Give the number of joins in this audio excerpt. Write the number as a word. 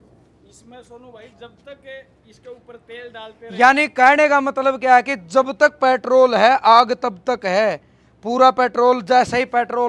zero